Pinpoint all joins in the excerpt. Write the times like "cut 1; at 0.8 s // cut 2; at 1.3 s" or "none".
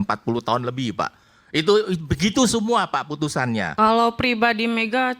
cut 1; at 3.7 s